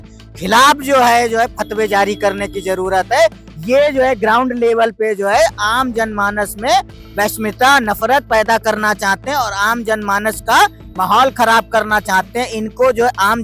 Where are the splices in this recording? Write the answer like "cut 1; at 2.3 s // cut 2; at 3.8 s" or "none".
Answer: none